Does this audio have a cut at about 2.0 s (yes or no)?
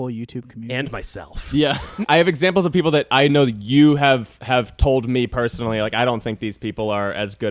yes